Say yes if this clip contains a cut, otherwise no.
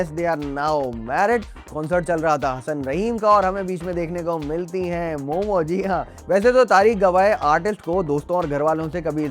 yes